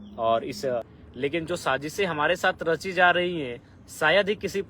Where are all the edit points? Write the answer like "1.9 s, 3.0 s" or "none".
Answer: 1.0 s